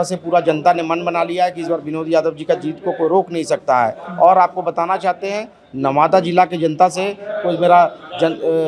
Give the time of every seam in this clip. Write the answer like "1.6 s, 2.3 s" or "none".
none